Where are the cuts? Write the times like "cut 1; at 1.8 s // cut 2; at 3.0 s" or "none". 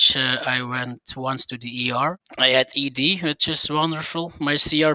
cut 1; at 2.3 s